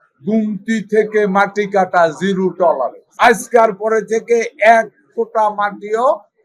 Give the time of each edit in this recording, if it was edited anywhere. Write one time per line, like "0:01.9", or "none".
0:03.0

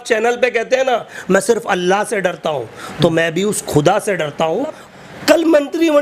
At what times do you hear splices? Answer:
0:04.8

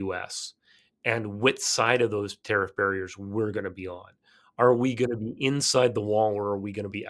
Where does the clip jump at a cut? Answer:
none

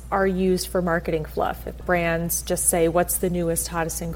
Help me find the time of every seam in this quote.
0:01.8

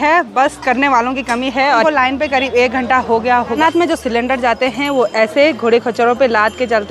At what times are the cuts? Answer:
0:01.8
0:03.6

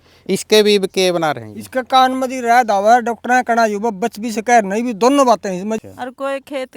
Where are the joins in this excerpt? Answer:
0:05.8

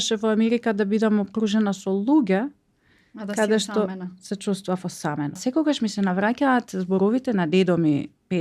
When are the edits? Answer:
0:05.4

